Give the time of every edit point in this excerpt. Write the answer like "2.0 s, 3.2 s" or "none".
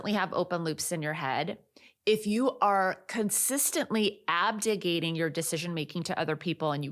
none